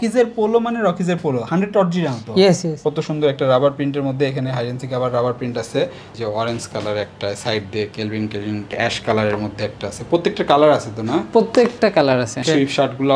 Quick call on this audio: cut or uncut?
cut